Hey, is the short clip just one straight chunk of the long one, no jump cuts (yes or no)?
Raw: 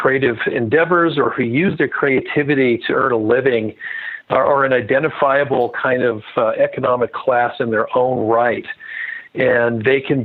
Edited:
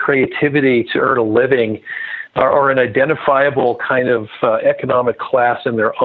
yes